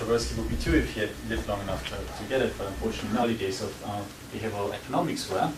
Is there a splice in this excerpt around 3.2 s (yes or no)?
no